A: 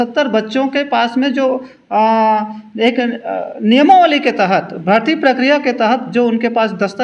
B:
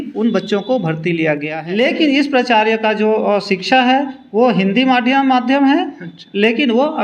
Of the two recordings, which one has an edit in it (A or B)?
B